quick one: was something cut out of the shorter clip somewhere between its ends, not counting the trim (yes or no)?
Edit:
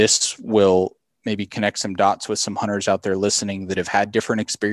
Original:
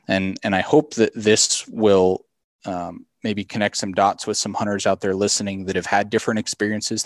yes